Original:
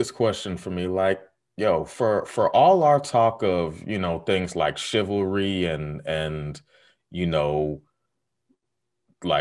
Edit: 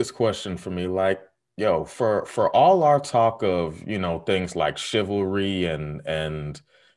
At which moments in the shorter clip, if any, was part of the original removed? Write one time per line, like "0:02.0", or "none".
none